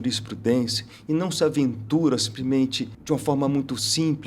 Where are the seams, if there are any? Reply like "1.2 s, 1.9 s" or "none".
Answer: 2.9 s